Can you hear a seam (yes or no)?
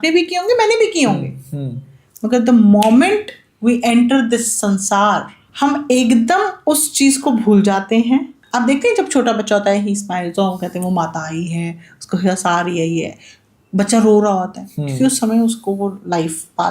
yes